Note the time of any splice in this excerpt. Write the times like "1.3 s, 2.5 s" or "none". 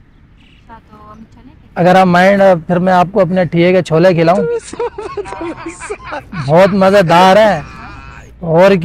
none